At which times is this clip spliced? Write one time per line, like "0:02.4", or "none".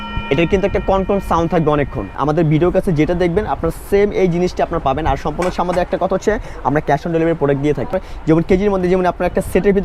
0:02.0
0:08.1

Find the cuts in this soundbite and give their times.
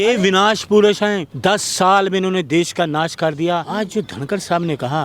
0:01.3
0:03.7

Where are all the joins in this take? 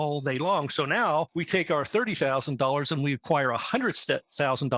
none

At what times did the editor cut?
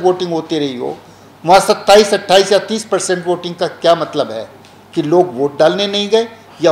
none

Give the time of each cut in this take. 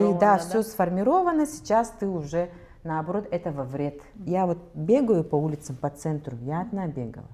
0:04.2

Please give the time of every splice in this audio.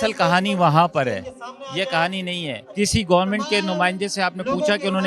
0:02.6

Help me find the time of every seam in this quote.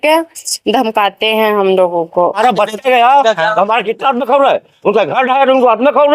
0:02.4

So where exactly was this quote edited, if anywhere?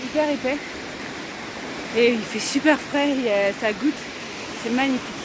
none

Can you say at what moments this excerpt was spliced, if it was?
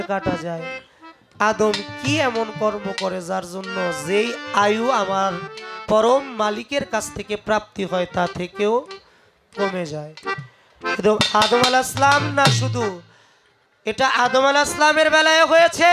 none

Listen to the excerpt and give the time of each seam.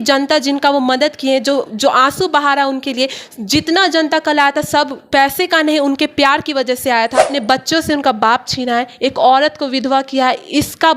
0:07.3

